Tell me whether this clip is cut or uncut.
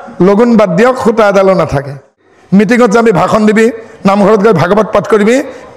cut